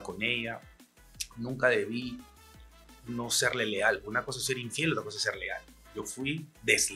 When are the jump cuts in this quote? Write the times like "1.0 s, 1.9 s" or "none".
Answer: 5.6 s